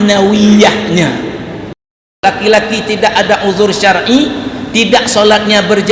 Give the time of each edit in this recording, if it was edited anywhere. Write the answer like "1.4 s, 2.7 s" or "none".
2.2 s